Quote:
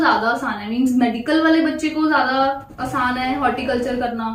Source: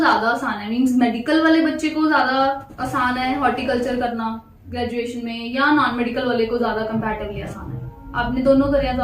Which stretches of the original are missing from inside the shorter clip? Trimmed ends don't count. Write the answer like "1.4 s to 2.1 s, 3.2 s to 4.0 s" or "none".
none

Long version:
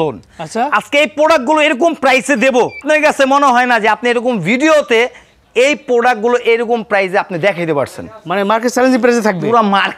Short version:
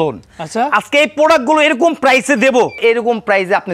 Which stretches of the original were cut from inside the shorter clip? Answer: 2.8 s to 6.4 s

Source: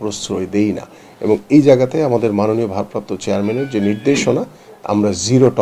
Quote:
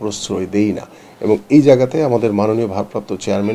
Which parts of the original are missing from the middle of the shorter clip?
none

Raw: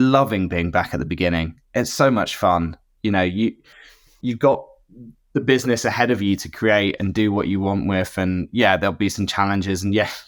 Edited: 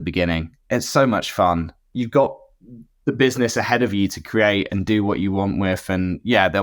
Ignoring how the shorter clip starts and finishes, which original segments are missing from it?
2.8 s to 4.1 s

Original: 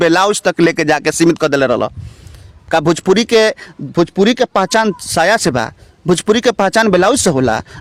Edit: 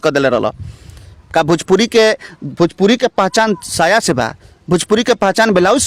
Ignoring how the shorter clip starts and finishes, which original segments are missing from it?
none

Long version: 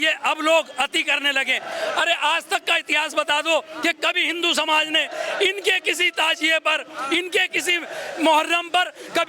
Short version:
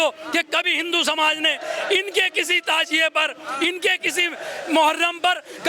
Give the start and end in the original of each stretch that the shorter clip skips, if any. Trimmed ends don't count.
none

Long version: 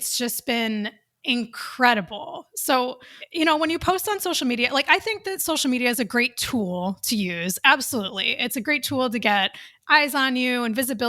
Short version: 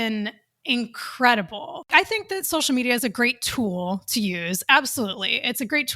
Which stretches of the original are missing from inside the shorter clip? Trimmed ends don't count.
2.5 s to 4.8 s

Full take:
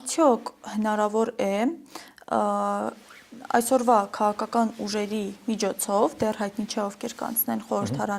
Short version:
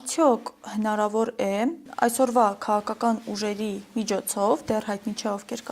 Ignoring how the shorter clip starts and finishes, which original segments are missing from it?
1.8 s to 3.4 s

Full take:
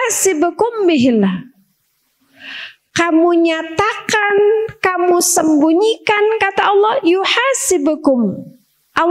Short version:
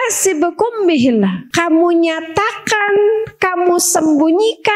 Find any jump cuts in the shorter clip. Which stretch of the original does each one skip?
1.4 s to 2.9 s

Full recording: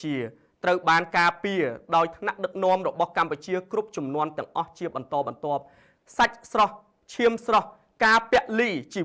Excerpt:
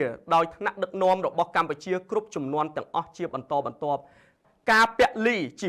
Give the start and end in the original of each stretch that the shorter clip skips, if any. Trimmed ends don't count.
6.0 s to 7.8 s

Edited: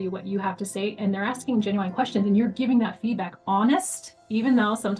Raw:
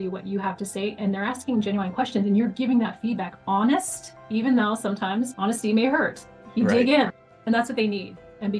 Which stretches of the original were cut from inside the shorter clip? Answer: none

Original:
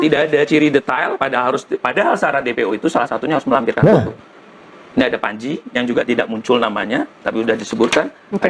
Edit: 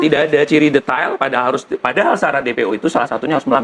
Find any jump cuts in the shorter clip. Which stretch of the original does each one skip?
none

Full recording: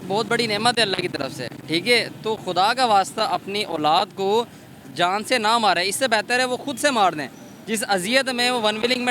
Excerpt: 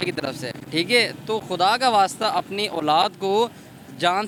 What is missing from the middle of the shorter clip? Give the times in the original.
none

